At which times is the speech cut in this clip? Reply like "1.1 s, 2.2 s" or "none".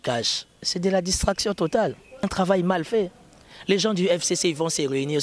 2.2 s